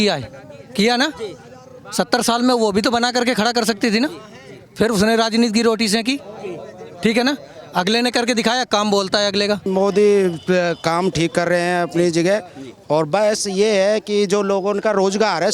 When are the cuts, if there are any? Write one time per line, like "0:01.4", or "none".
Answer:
0:09.7